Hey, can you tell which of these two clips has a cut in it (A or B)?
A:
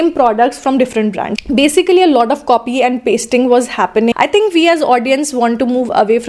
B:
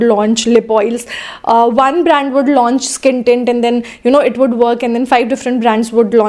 A